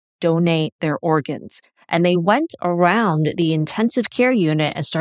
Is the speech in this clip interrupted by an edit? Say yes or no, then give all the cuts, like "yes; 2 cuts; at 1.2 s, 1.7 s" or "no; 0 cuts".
no; 0 cuts